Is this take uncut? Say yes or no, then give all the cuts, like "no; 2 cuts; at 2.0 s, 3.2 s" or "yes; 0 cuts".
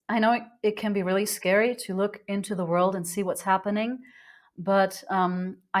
yes; 0 cuts